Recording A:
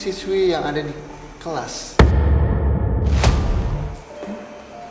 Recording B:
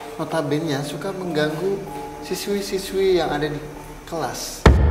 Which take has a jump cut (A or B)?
A